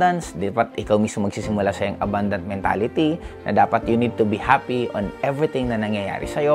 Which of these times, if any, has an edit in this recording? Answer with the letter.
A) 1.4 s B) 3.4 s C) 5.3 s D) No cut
D